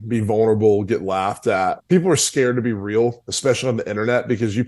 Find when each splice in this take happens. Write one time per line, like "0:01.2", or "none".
0:01.8